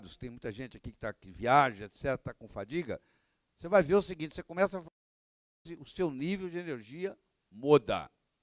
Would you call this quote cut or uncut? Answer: uncut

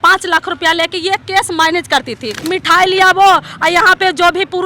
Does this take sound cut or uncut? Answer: cut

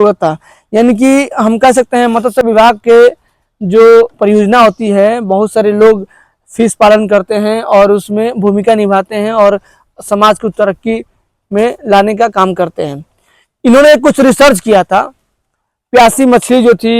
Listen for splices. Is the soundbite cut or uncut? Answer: uncut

